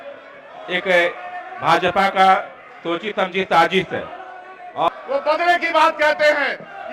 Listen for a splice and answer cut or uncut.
cut